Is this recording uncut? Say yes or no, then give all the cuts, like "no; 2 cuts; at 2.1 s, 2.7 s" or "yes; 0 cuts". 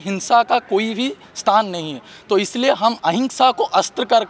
yes; 0 cuts